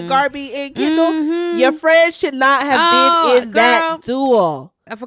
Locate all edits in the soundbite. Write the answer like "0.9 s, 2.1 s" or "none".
none